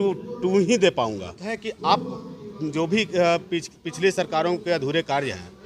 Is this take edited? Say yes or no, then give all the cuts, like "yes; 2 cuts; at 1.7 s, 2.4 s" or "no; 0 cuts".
yes; 1 cut; at 1.5 s